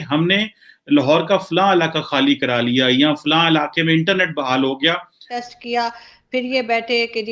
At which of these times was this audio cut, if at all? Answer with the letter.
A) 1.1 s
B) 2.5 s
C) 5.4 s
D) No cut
C